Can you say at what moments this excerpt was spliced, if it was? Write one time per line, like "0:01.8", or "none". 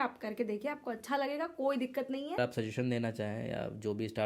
0:02.4